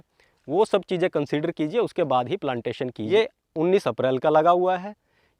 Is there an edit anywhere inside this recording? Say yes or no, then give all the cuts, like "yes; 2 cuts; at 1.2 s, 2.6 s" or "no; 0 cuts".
yes; 1 cut; at 3.0 s